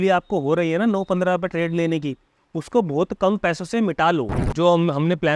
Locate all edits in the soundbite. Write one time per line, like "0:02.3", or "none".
0:04.4